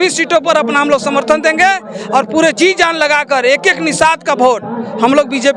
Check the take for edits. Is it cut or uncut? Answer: uncut